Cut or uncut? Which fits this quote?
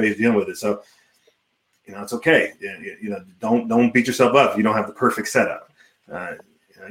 uncut